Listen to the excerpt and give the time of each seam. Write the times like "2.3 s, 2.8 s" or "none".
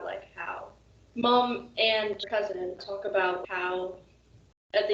2.2 s